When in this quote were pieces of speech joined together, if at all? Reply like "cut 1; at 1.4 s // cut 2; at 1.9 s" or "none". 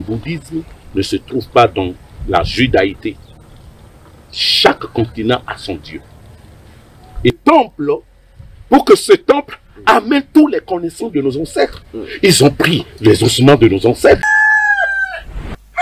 cut 1; at 7.4 s // cut 2; at 14.3 s

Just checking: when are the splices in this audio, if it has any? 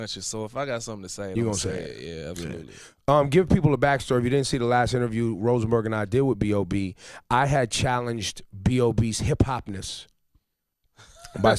cut 1; at 7.5 s

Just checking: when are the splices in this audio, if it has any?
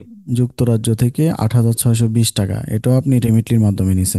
none

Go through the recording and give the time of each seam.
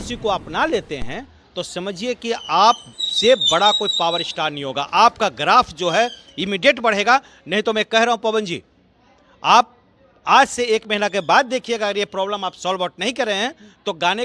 none

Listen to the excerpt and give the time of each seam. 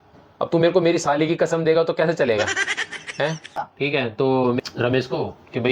cut 1; at 3.7 s

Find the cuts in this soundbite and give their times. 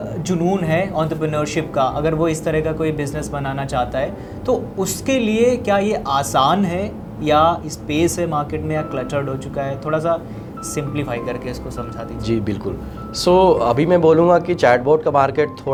none

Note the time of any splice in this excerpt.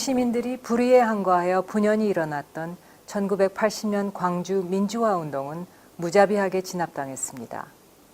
cut 1; at 5.4 s

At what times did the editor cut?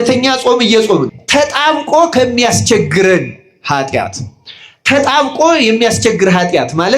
cut 1; at 1.2 s

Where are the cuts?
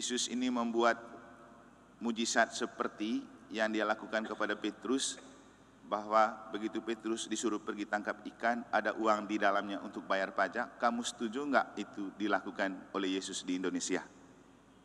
none

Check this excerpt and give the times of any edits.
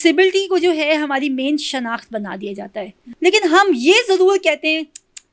cut 1; at 3.0 s

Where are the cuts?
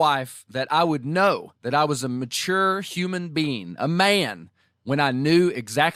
none

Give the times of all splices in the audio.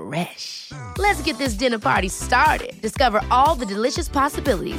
none

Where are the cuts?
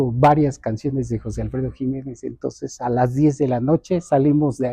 none

